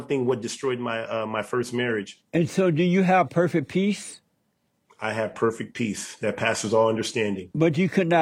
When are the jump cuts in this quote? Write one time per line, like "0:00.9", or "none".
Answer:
0:02.2